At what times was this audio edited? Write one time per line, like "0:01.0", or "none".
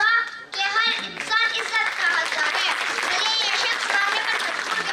none